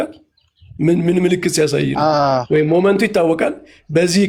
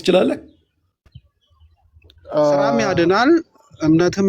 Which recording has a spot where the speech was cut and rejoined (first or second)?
second